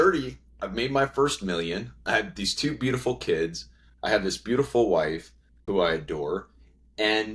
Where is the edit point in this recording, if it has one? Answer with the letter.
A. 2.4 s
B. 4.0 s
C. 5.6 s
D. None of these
C